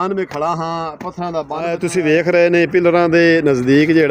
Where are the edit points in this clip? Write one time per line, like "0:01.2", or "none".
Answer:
0:01.5